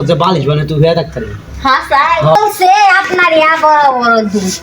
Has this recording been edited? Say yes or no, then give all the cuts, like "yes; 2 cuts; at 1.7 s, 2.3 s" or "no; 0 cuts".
yes; 1 cut; at 2.3 s